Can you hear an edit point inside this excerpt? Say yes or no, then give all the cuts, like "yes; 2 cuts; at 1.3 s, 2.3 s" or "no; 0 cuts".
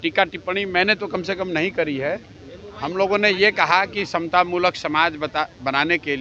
no; 0 cuts